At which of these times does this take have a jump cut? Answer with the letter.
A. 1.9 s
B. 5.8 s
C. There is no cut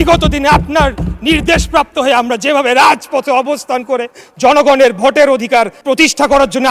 B